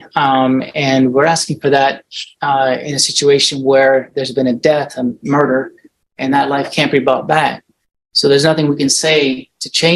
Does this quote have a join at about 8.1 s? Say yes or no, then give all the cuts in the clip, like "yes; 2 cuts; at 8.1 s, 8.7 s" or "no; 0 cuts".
no; 0 cuts